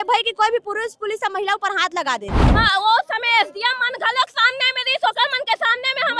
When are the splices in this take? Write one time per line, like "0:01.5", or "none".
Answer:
0:02.4